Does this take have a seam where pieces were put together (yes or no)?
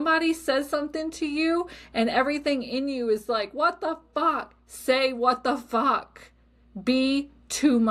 no